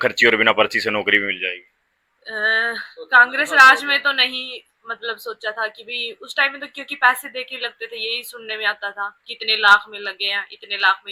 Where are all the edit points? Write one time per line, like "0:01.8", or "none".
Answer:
none